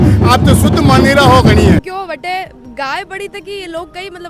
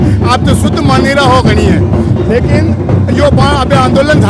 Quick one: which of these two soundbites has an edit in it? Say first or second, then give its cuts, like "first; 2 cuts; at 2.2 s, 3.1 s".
first; 1 cut; at 1.8 s